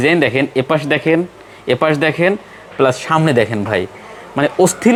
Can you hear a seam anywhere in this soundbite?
no; 0 cuts

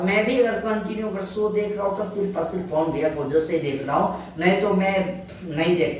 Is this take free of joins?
yes; 0 cuts

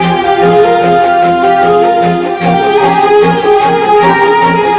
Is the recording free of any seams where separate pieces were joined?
yes; 0 cuts

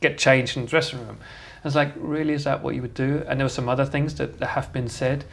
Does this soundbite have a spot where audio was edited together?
no; 0 cuts

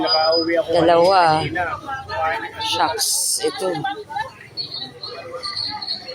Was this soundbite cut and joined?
no; 0 cuts

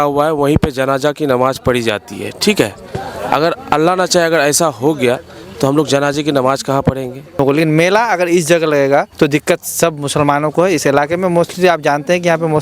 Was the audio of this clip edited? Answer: yes; 2 cuts; at 7.4 s, 9.1 s

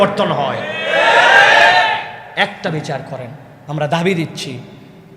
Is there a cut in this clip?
no; 0 cuts

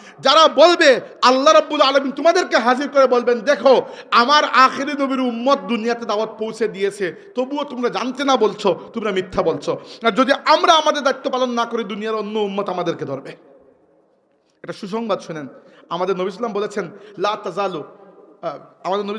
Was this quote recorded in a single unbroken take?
yes; 0 cuts

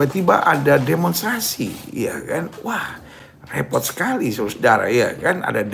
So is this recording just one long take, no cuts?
yes; 0 cuts

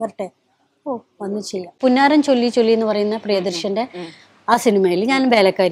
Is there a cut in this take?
yes; 1 cut; at 1.8 s

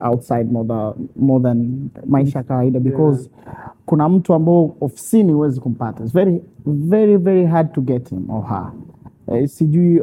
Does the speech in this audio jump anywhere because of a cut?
no; 0 cuts

